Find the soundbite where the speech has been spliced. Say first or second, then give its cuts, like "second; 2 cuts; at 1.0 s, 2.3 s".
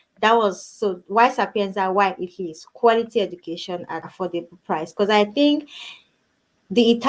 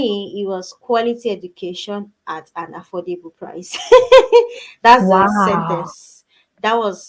first; 1 cut; at 4.0 s